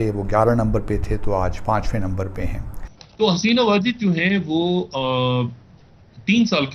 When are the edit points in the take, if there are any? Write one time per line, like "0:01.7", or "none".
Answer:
0:02.7